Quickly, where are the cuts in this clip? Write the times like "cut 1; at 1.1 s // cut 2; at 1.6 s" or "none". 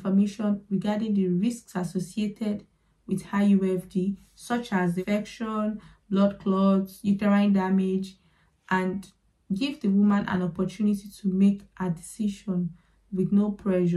cut 1; at 4.9 s